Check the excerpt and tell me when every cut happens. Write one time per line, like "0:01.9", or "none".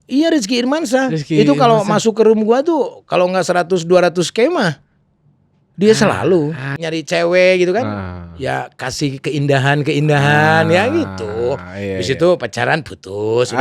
0:06.8